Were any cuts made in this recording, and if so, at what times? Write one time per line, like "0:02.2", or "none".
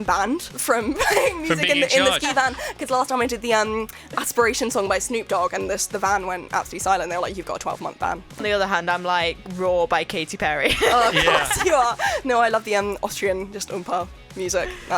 0:08.4